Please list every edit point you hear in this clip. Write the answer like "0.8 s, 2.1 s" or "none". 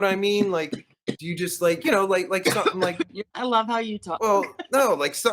3.3 s